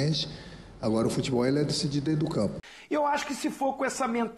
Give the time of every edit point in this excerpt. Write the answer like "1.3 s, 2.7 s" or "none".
2.7 s